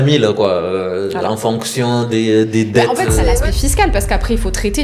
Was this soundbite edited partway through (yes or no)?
yes